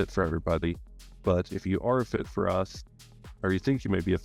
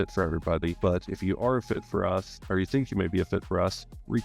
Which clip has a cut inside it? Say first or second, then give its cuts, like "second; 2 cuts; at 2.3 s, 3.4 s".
second; 2 cuts; at 0.8 s, 2.4 s